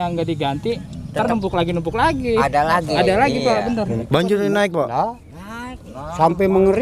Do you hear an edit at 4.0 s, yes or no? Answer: yes